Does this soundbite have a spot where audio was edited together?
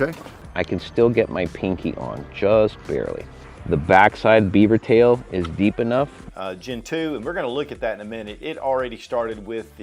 yes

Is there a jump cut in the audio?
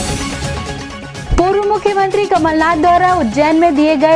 yes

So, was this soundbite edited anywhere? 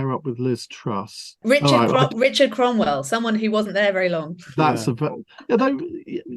yes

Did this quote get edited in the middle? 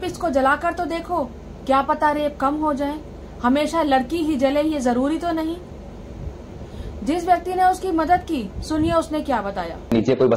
no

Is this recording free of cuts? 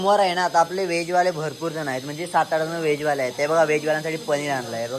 yes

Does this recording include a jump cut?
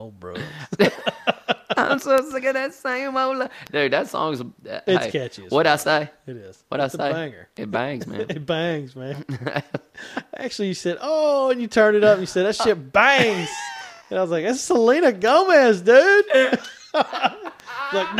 no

